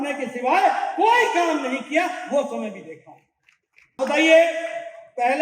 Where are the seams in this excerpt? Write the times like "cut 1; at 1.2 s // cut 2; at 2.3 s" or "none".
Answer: cut 1; at 4.0 s